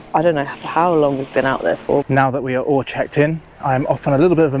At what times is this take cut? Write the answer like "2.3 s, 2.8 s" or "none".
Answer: 2.0 s